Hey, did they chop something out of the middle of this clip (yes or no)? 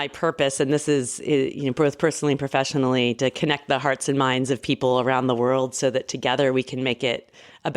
no